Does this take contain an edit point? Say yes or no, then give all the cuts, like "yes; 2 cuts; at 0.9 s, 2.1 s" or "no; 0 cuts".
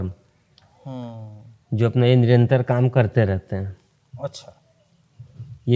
no; 0 cuts